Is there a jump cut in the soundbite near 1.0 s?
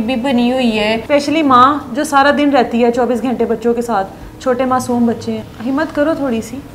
yes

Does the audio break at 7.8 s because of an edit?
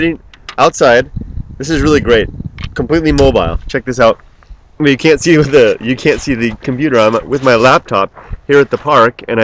no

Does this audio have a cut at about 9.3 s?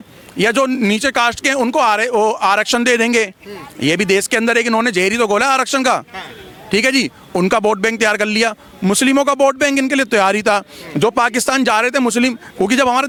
no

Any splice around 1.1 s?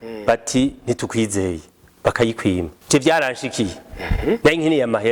no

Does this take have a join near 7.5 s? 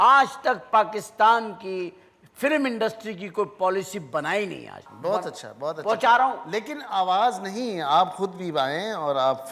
no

